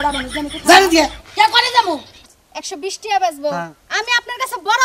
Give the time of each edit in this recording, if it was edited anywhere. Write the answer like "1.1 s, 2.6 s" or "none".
2.2 s